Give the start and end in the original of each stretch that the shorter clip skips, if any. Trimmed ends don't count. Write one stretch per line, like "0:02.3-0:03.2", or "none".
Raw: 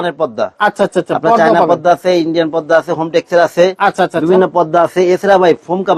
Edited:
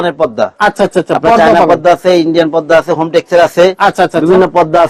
none